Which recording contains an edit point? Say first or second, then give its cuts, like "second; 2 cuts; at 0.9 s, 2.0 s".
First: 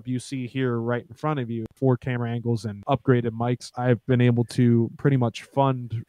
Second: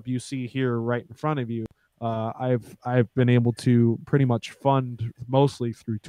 first; 3 cuts; at 1.7 s, 2.8 s, 3.7 s